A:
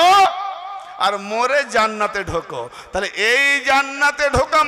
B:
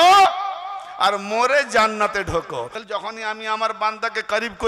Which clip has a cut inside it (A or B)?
B